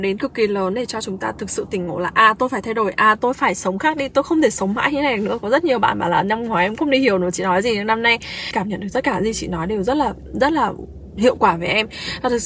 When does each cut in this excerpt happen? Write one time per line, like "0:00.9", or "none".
0:08.5